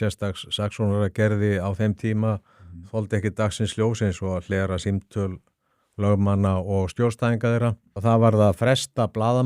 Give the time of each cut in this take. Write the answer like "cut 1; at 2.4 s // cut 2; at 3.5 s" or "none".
cut 1; at 7.9 s

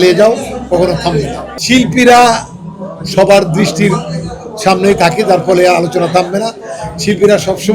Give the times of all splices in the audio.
none

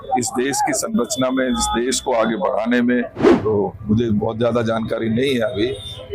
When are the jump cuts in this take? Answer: cut 1; at 3.2 s

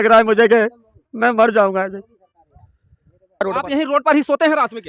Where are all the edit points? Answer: cut 1; at 3.4 s

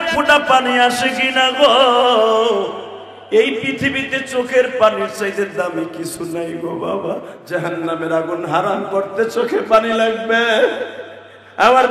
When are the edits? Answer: cut 1; at 7.3 s

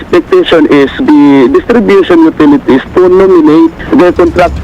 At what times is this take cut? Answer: cut 1; at 1.0 s

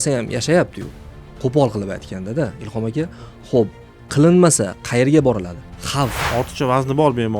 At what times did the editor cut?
cut 1; at 6.2 s

